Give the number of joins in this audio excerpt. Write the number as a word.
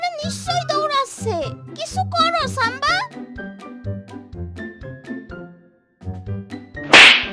zero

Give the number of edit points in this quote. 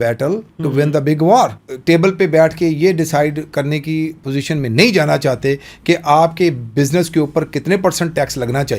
one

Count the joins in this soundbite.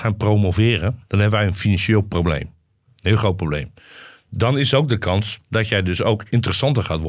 two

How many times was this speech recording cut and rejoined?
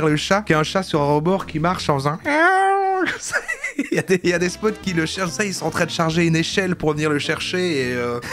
zero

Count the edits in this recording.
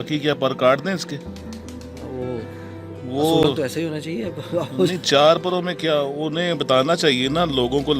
zero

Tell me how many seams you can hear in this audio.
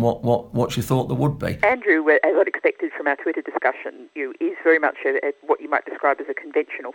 one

